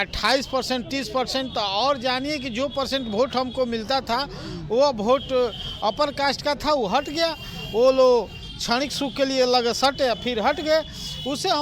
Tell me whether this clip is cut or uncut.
uncut